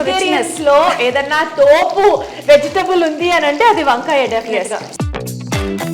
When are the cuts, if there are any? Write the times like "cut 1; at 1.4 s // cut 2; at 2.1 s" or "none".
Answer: cut 1; at 4.9 s